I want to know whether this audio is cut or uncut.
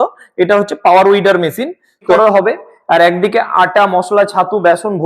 cut